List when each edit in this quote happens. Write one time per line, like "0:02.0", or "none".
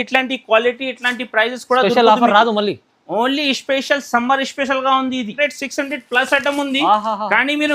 0:05.3